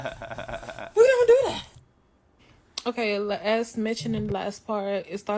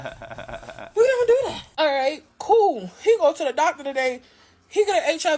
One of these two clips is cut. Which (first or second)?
second